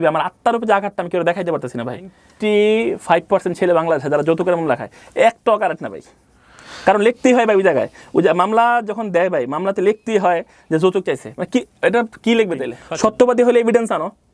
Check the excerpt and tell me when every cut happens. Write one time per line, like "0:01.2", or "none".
0:02.2
0:12.8